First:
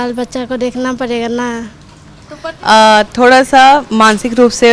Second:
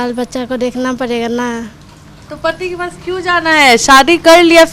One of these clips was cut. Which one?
first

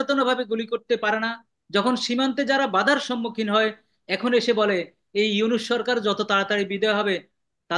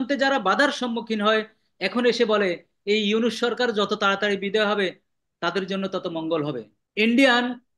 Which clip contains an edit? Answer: second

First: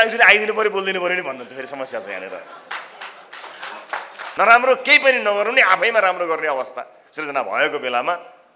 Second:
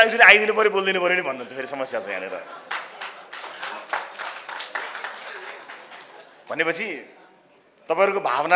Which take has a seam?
first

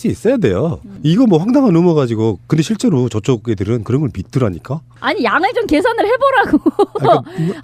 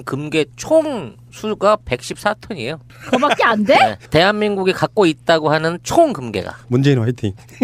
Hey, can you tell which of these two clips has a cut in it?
first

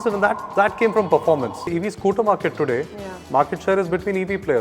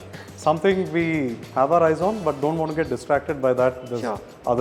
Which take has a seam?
first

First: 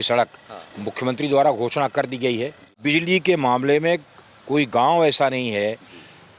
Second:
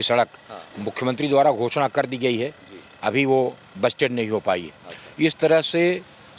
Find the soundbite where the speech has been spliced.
first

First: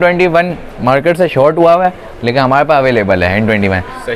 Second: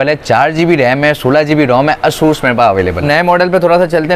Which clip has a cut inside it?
second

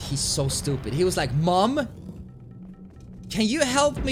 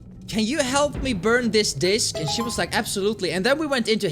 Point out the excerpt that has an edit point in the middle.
second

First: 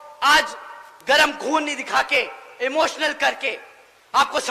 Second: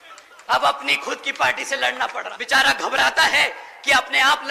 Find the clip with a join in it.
second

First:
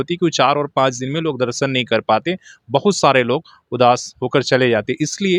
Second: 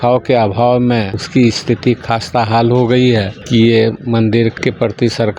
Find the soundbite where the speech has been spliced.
second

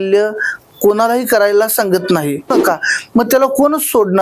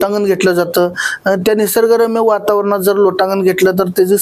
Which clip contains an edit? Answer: first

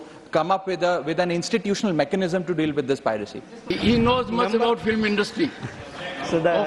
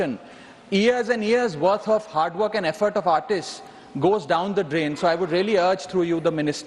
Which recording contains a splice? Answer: first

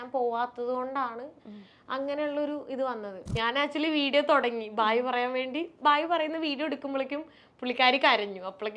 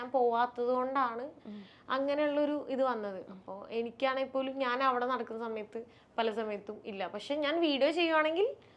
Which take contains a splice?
first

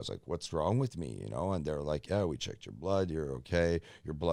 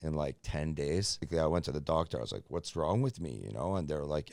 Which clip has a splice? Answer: second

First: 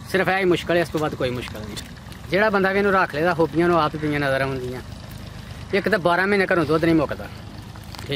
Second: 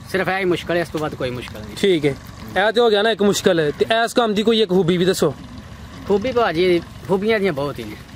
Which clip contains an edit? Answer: first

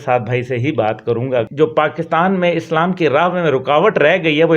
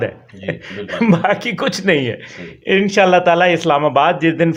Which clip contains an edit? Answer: first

